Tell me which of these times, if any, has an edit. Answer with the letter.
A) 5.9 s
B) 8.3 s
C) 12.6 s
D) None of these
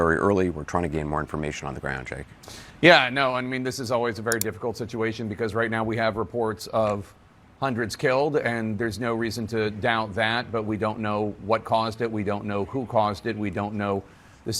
D